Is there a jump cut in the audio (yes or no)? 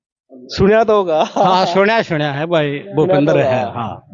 no